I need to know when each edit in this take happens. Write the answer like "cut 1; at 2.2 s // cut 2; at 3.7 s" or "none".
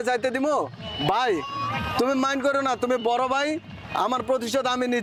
none